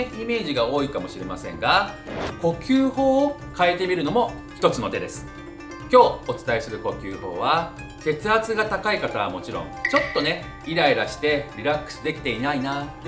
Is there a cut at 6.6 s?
no; 1 cut; at 9.7 s

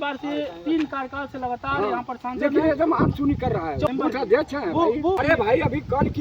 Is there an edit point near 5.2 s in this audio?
yes; 2 cuts; at 3.9 s, 5.2 s

